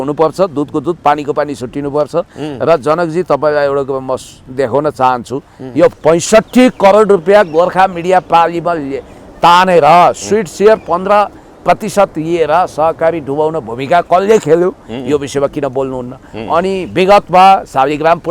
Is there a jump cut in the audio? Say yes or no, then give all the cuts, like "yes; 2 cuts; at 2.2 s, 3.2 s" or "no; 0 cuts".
yes; 1 cut; at 5.9 s